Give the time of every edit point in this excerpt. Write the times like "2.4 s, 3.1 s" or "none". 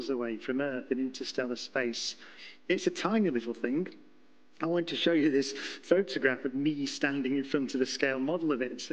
none